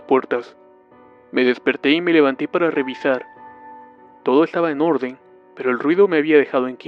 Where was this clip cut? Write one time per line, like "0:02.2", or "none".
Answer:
0:02.7